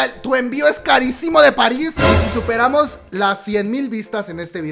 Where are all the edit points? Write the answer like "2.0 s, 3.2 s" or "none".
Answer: 2.1 s